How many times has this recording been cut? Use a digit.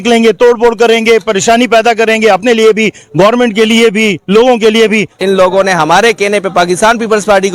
1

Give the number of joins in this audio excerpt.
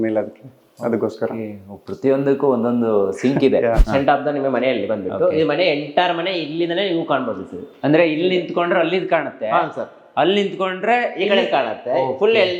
1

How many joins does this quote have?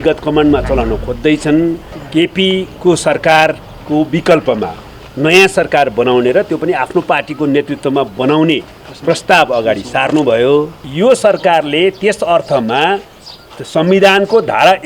2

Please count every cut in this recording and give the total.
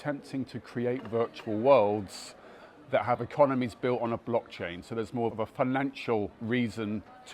2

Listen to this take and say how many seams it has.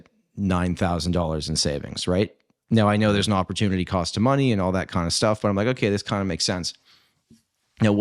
0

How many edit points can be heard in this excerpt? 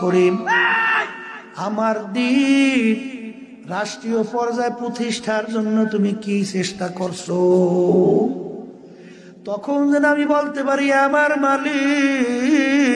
0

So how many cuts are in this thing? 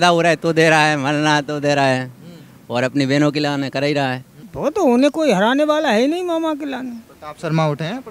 1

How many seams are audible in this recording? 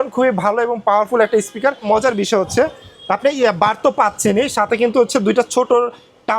1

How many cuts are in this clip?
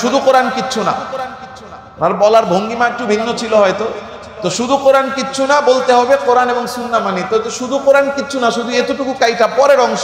0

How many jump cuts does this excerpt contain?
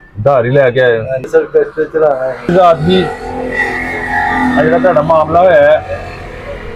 0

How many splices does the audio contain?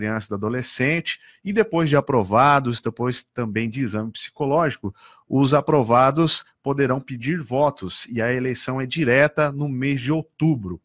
0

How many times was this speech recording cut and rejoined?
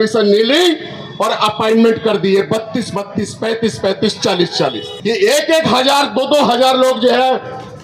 1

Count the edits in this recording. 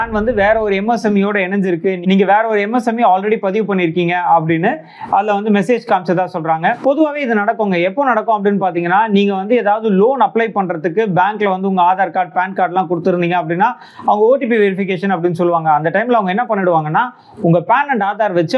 0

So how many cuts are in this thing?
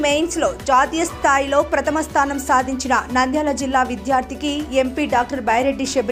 0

